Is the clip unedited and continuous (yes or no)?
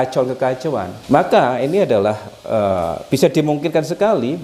no